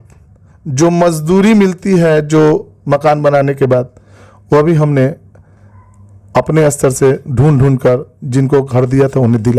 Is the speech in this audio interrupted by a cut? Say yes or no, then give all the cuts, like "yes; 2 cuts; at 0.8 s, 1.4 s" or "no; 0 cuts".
no; 0 cuts